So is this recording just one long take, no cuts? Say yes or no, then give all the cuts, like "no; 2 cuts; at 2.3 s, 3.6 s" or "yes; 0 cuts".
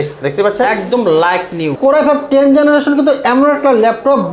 no; 1 cut; at 1.7 s